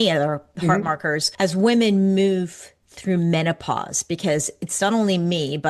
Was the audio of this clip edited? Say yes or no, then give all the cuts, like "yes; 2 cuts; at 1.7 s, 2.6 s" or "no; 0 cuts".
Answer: yes; 1 cut; at 1.3 s